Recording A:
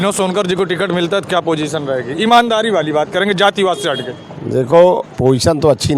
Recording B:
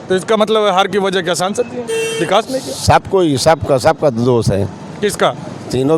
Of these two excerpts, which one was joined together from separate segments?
A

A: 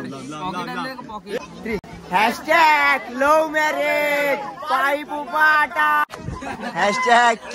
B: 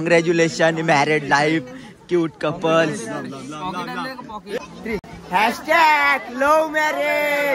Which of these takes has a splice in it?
A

